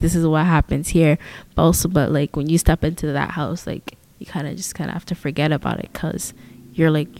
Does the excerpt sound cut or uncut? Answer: uncut